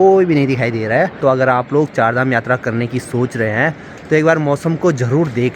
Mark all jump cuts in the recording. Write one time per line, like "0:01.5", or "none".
0:01.2